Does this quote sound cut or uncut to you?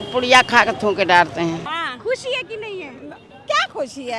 cut